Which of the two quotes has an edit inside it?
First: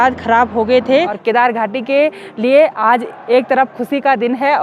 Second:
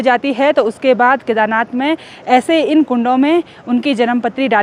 first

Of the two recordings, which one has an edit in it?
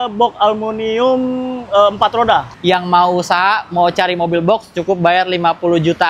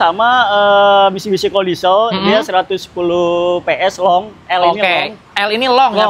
first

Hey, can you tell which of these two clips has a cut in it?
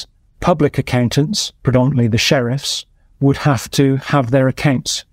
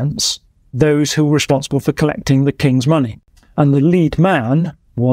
second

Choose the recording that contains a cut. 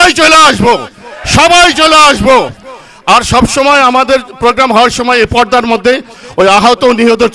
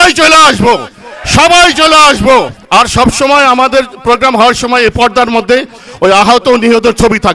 second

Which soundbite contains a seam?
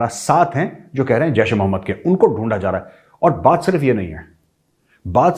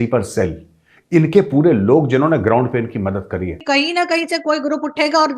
second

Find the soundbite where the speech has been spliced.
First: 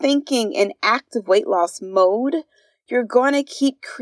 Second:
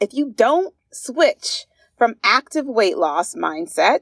first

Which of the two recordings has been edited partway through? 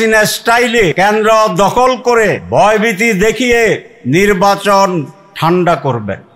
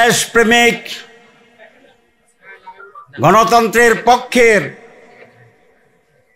first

